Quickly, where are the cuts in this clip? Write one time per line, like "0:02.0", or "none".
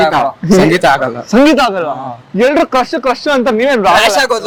none